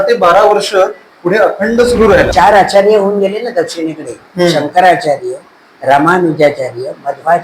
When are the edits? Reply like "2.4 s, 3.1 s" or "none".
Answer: 2.3 s